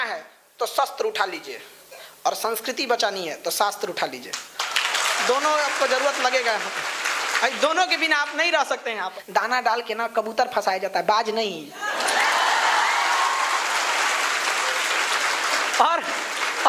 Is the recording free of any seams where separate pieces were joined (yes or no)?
no